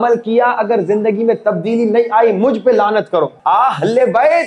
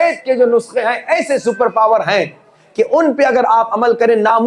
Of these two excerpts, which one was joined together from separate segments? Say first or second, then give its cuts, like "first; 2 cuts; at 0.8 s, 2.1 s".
first; 1 cut; at 3.4 s